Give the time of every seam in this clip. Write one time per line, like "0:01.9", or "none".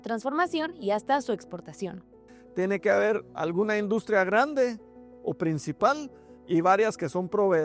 0:02.3